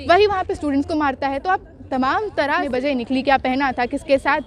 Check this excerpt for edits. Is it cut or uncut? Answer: cut